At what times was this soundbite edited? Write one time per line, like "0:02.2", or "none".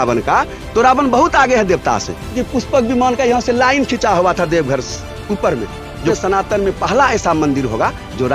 0:02.4
0:06.1